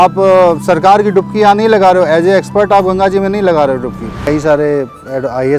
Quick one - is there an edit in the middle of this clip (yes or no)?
yes